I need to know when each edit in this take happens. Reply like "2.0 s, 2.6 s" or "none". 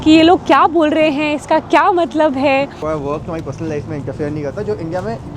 2.8 s

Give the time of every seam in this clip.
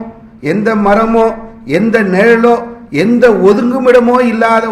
none

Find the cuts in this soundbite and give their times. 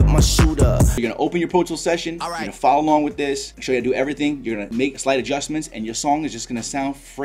0.9 s, 4.8 s

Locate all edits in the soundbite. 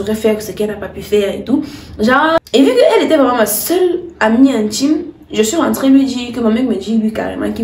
2.4 s

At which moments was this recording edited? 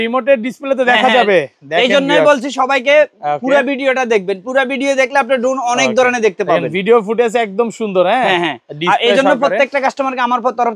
none

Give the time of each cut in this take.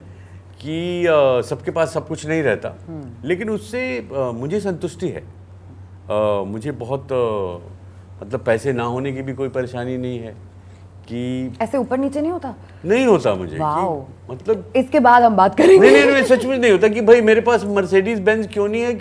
none

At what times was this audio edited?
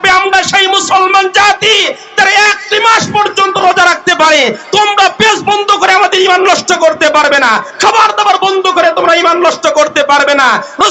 none

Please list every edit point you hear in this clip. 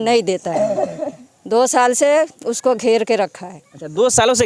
none

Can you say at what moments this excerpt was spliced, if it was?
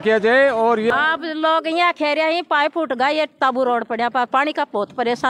0.9 s

